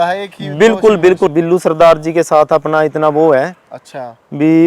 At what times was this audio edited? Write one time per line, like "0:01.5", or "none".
0:01.3